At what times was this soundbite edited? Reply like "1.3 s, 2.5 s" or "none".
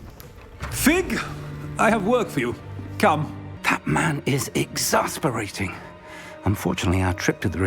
3.5 s